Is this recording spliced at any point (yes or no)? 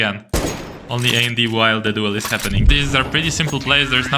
yes